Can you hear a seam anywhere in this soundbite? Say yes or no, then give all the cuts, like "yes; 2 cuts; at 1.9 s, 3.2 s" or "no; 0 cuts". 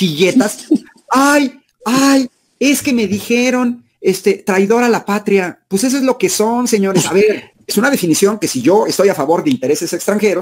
yes; 1 cut; at 7.5 s